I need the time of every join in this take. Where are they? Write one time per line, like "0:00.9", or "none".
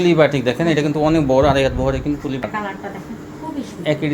0:02.4